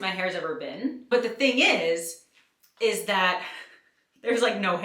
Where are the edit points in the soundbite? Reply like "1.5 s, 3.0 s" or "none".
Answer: 1.0 s

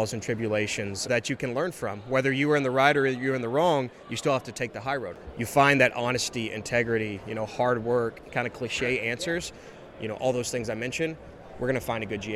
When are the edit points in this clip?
1.1 s, 5.1 s, 8.3 s, 9.7 s

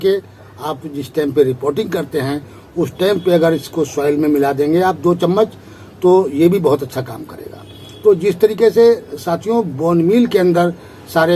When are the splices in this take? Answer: none

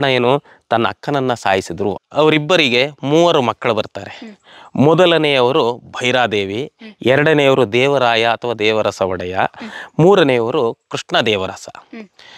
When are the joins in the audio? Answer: 1.9 s

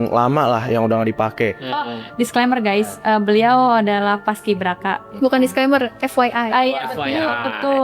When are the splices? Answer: none

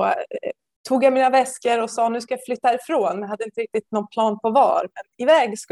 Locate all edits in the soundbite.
none

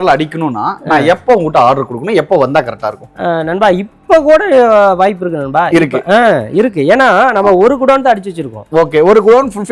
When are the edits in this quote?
none

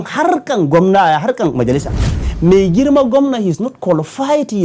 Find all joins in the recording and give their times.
2.3 s

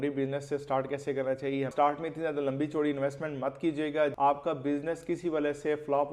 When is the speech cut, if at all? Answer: 1.7 s, 4.1 s

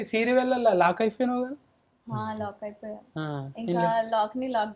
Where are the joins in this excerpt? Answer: none

